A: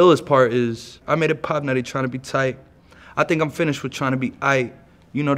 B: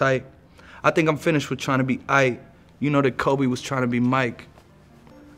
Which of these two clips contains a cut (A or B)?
A